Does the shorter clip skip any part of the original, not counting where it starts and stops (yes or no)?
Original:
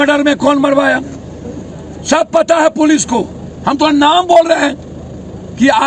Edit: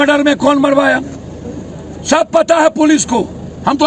no